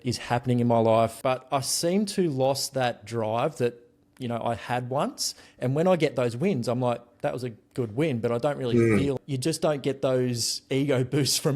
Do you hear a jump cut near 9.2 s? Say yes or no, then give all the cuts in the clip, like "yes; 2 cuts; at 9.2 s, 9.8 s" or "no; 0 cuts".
yes; 2 cuts; at 1.2 s, 9.2 s